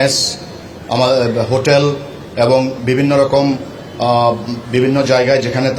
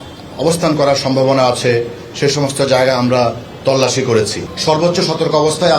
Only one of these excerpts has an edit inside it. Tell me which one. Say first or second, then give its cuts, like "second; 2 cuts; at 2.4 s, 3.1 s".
second; 1 cut; at 4.5 s